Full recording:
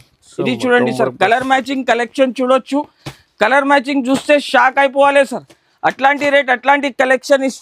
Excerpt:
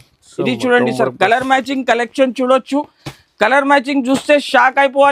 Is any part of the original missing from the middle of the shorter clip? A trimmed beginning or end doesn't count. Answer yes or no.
no